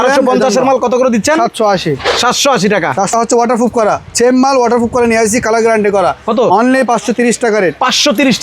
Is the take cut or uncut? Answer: cut